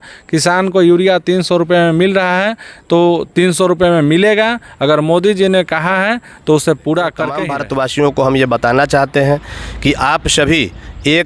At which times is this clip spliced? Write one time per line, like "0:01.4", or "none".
0:07.4